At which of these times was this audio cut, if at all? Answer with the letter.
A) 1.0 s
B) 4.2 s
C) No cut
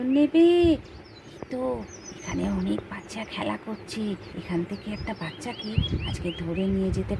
B